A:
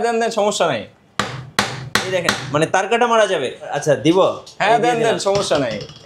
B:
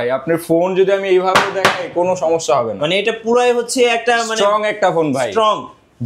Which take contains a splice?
A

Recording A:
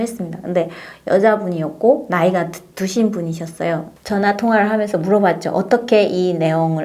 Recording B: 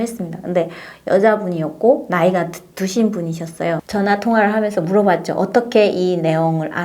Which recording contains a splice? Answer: B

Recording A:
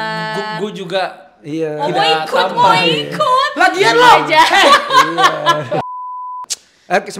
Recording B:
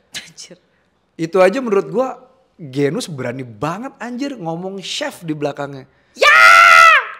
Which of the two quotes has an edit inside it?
A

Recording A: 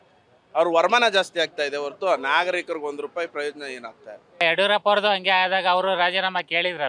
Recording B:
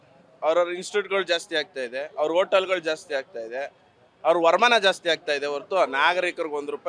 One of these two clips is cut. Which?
A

